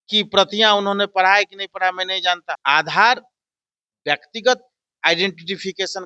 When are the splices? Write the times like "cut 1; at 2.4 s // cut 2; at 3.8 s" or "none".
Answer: cut 1; at 2.6 s